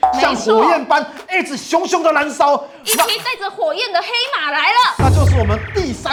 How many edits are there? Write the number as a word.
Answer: zero